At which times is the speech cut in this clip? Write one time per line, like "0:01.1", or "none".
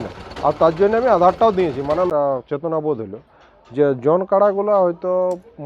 0:02.1

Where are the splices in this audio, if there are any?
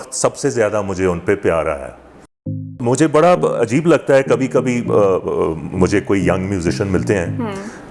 0:02.6

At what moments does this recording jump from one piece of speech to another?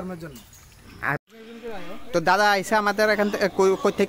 0:01.2

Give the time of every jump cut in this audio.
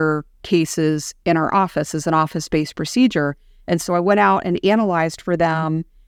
none

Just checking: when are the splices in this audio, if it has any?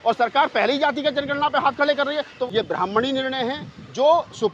0:02.4

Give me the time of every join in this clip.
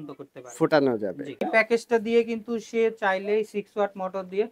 0:01.4

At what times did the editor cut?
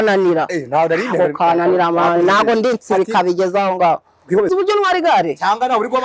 0:04.5

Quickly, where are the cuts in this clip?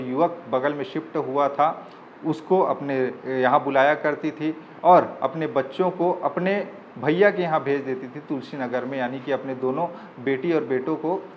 none

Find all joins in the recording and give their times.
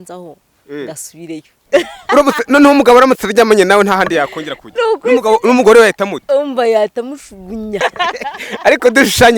0:07.8

